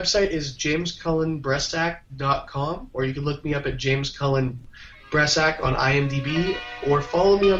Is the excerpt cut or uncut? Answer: uncut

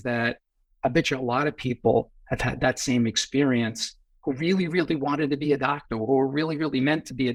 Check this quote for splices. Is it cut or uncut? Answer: uncut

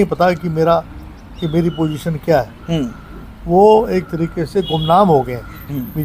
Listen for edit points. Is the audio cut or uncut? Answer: uncut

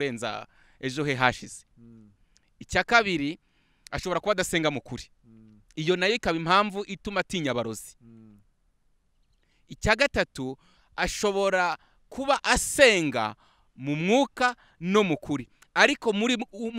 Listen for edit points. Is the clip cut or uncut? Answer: uncut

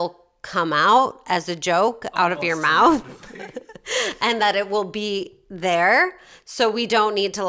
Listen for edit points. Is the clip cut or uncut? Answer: uncut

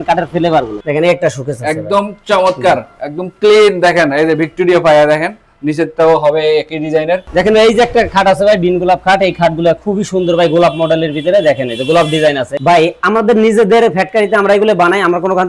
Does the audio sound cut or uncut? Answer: cut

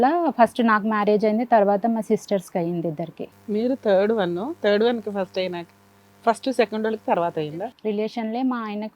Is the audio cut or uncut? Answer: cut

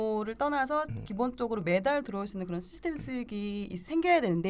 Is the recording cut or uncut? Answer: uncut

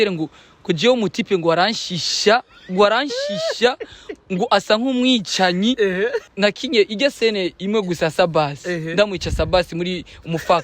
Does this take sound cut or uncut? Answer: cut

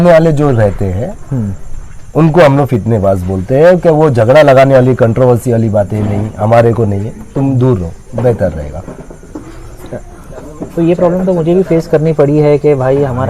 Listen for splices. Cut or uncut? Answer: uncut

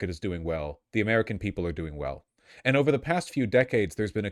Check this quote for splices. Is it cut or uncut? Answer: uncut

